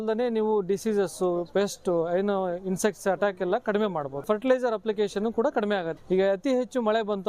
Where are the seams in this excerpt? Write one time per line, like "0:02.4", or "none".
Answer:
0:04.2
0:05.9

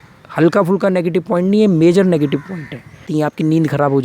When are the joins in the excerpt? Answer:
0:03.0

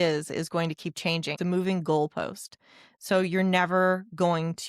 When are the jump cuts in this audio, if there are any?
0:01.3

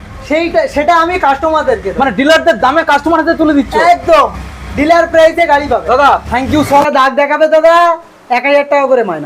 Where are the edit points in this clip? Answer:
0:06.9

